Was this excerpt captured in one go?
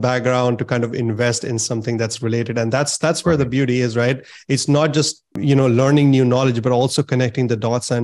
no; 1 cut; at 5.3 s

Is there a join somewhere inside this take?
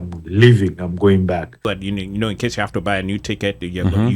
yes; 1 cut; at 1.7 s

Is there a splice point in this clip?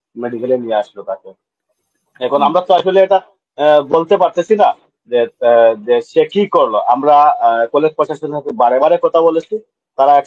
no; 0 cuts

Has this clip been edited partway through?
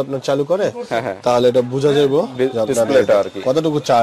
no; 0 cuts

